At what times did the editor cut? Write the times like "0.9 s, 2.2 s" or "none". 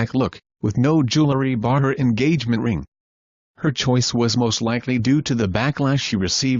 2.4 s